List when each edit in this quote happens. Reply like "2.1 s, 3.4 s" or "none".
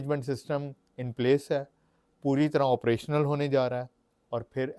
none